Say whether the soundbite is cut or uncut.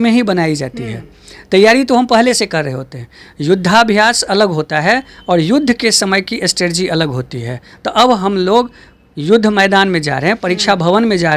uncut